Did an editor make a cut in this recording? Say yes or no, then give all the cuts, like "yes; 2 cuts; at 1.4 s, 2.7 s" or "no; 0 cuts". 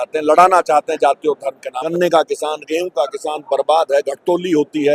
yes; 1 cut; at 1.9 s